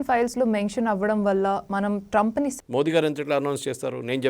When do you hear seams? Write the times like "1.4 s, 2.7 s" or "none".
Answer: 2.5 s